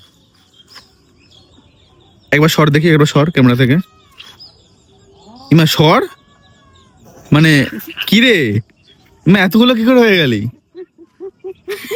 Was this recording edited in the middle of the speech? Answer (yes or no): no